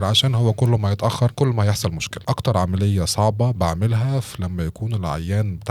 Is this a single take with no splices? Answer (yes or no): no